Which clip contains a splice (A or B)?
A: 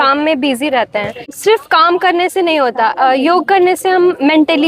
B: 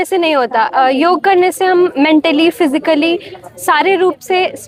A